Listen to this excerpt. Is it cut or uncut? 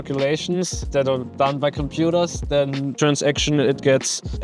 cut